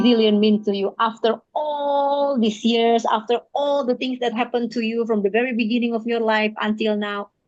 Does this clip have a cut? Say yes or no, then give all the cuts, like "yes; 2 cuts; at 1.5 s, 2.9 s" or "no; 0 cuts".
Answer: no; 0 cuts